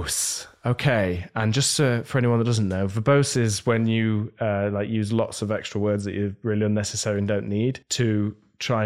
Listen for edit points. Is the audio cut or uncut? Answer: cut